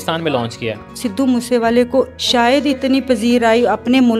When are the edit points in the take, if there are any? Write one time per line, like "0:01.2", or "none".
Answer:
0:01.0
0:02.2